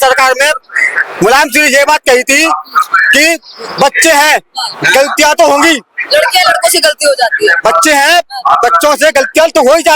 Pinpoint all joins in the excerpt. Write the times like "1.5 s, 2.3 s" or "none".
none